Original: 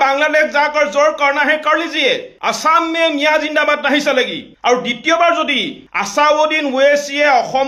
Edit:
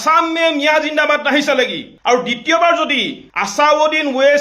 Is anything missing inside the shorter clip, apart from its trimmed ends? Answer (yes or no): no